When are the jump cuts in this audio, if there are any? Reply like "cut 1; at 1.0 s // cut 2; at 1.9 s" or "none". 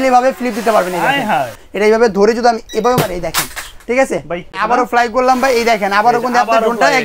cut 1; at 1.6 s // cut 2; at 4.6 s